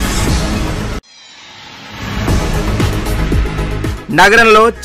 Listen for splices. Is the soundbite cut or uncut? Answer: cut